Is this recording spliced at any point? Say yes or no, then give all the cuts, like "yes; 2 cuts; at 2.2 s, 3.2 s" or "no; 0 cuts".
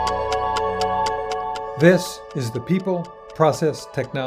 yes; 1 cut; at 1.7 s